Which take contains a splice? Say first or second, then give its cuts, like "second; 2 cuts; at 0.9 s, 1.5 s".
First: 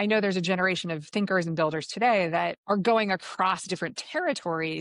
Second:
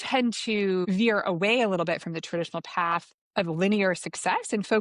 first; 1 cut; at 2.6 s